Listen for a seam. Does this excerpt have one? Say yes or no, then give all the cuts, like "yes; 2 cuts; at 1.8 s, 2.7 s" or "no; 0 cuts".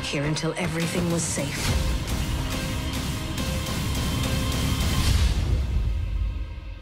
no; 0 cuts